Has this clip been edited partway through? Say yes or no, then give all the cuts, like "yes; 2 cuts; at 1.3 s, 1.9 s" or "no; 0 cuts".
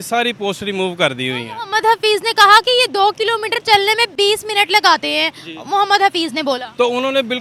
no; 0 cuts